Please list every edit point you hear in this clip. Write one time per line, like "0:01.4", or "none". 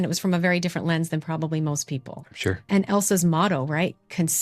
0:02.7